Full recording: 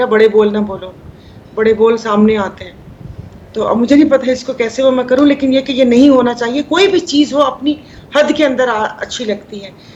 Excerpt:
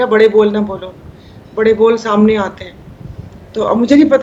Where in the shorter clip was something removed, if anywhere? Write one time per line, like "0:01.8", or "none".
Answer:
none